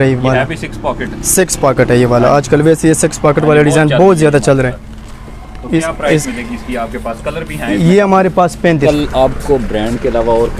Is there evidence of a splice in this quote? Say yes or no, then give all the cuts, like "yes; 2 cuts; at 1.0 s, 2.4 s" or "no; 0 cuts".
yes; 1 cut; at 8.8 s